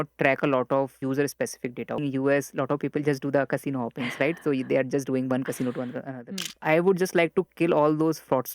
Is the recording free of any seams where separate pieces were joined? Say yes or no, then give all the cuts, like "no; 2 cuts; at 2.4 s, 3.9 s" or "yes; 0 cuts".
no; 3 cuts; at 1.0 s, 2.0 s, 6.4 s